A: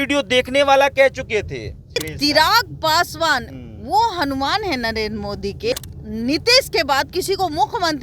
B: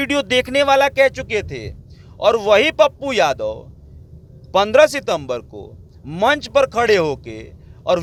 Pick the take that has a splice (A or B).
A